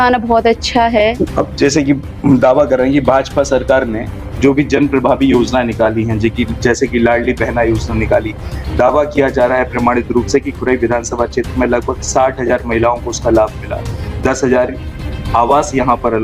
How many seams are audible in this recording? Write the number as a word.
one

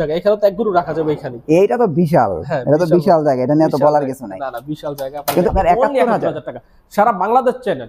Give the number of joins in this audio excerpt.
one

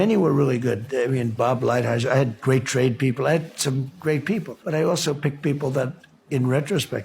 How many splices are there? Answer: one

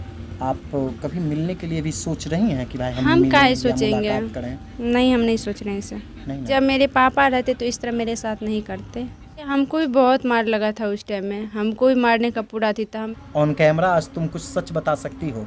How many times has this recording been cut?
three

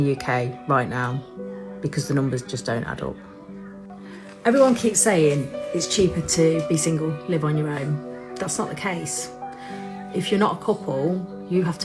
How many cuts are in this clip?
zero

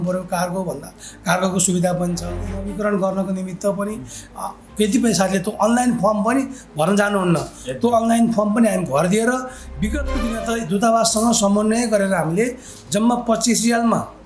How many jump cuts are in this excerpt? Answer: one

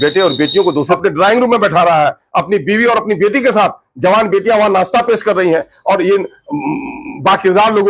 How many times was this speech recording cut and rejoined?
one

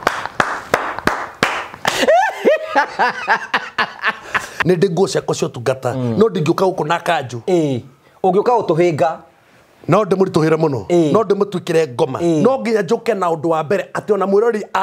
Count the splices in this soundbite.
one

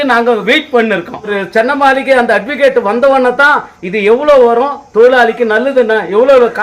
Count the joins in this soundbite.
one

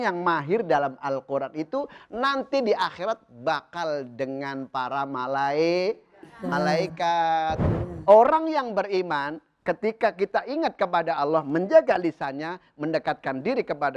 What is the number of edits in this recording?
one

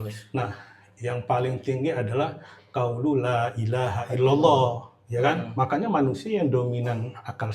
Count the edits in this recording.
one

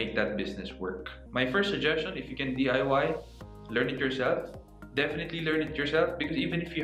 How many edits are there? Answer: one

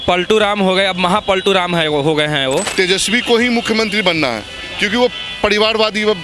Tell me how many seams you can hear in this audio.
one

